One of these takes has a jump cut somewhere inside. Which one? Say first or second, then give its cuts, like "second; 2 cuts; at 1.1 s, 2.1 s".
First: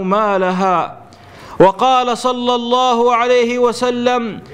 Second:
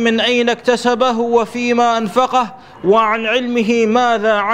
first; 1 cut; at 3.3 s